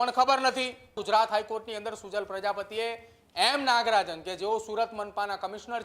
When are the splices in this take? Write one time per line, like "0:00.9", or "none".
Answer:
0:01.0